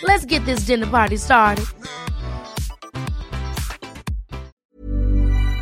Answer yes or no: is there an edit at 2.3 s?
no